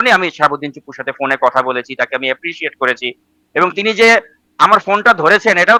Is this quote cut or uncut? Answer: uncut